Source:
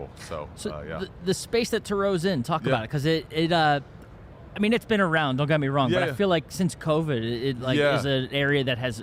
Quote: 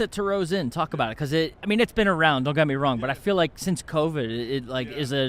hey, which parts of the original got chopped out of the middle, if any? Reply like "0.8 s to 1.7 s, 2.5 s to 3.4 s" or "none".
3.3 s to 4.5 s